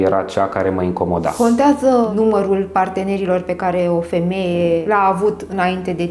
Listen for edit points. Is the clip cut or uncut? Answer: cut